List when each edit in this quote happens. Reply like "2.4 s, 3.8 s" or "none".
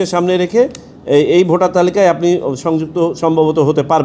none